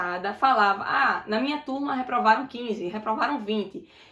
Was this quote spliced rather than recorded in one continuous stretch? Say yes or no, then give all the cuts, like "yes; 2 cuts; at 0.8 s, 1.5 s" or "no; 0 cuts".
no; 0 cuts